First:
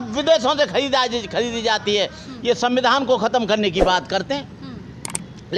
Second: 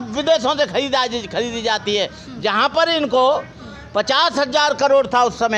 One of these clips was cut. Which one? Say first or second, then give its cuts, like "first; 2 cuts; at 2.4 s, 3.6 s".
first; 1 cut; at 2.2 s